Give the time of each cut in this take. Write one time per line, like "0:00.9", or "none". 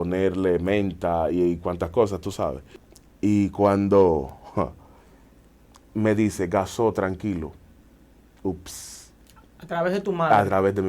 0:02.7